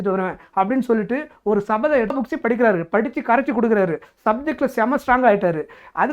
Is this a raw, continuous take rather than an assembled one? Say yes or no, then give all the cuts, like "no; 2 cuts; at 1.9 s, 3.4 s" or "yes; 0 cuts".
no; 1 cut; at 2.1 s